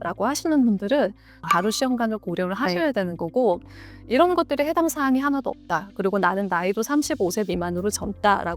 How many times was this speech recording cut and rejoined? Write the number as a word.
one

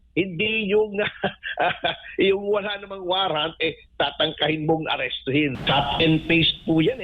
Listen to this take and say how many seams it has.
one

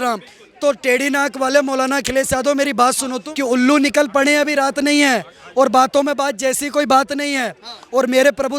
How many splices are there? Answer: one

